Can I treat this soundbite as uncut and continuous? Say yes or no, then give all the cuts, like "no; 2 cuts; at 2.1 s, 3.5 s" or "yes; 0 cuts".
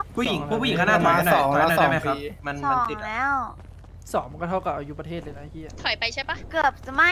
yes; 0 cuts